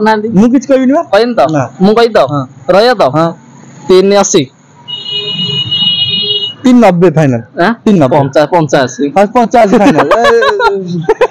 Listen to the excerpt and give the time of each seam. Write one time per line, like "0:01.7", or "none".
none

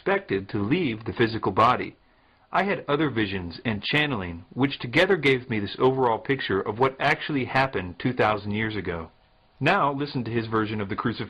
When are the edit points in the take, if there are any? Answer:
0:02.8

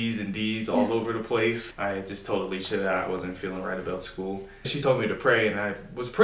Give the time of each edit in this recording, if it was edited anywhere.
0:01.6
0:04.8

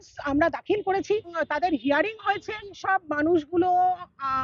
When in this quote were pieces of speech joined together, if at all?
0:01.4
0:02.8

